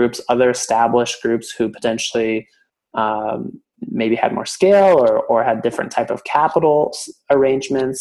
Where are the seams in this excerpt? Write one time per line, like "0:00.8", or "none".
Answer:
none